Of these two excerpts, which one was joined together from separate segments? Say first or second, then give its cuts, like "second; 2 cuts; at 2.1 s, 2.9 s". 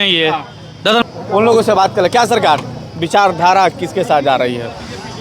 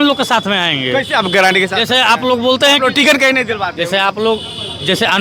first; 1 cut; at 1.0 s